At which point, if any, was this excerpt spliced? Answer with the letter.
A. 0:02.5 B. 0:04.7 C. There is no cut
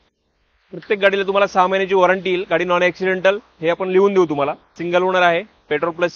B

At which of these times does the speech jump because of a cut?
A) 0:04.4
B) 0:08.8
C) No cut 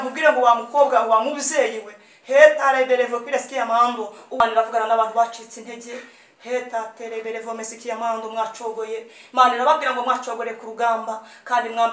A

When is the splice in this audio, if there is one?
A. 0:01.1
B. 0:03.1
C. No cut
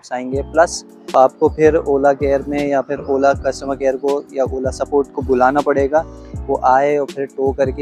A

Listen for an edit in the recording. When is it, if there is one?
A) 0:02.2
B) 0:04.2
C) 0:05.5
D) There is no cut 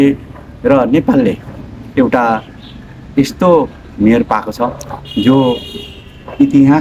D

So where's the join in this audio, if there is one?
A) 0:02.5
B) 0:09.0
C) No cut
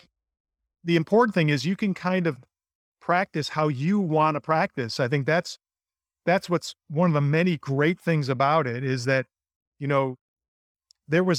C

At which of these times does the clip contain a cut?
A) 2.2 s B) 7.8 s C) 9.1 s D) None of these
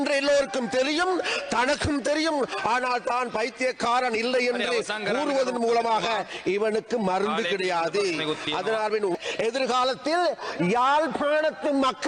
C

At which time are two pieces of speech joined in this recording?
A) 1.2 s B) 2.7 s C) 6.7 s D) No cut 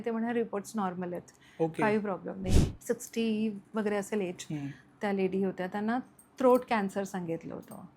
B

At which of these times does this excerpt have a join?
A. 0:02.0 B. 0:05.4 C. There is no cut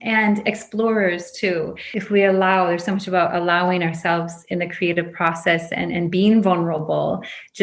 A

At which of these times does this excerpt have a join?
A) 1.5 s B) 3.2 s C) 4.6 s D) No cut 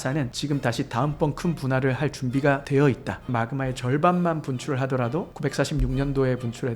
B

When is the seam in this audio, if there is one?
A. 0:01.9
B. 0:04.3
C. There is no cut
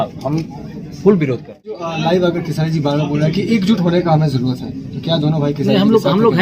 A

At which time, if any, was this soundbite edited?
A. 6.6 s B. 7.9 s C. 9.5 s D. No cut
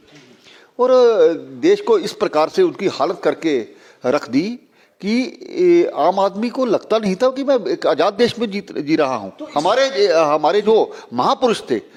D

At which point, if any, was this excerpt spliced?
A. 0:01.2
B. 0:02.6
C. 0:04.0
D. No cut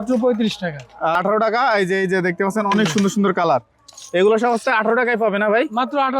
A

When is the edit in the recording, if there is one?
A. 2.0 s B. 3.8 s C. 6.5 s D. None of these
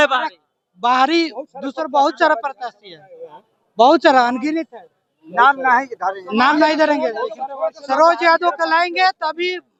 D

